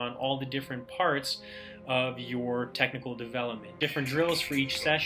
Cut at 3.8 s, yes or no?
yes